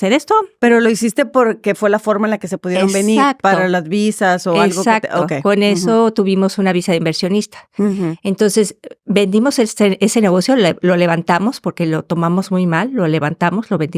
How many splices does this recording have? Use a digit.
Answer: 0